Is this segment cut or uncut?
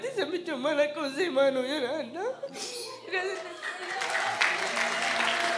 uncut